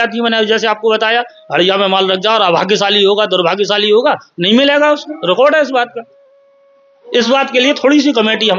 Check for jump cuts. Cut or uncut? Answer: uncut